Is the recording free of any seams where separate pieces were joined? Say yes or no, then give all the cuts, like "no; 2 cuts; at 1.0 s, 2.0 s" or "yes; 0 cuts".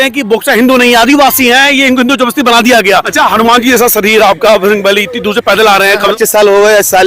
no; 2 cuts; at 3.1 s, 6.1 s